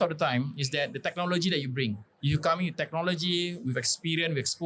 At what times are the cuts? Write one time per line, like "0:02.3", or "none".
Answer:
0:02.1